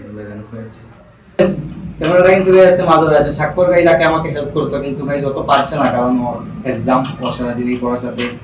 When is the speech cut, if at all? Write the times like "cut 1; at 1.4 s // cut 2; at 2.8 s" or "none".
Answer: cut 1; at 1.4 s